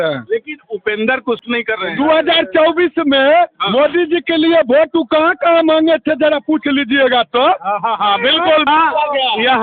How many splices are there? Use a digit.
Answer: 2